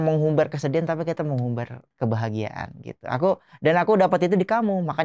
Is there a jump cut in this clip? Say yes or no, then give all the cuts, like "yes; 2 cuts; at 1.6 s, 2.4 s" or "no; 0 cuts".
yes; 1 cut; at 1.8 s